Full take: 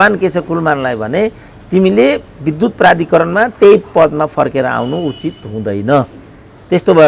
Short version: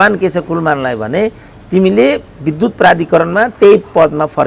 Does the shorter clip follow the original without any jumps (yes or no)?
yes